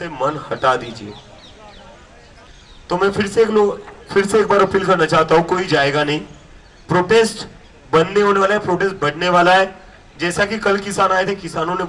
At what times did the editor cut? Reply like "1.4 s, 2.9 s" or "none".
2.5 s